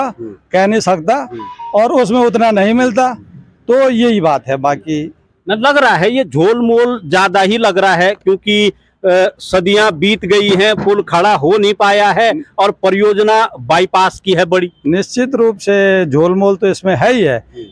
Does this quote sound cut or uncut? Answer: uncut